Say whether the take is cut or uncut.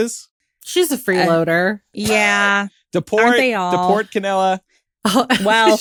uncut